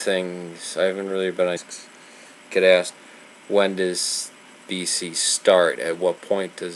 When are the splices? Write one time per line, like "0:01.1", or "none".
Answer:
none